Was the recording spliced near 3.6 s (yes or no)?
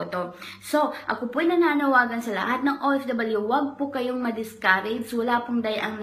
no